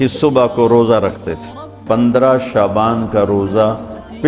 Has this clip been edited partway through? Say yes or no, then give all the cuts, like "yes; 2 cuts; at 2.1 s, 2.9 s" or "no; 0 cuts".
yes; 1 cut; at 2.0 s